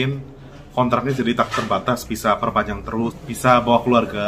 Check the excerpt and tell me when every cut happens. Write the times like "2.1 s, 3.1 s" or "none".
3.2 s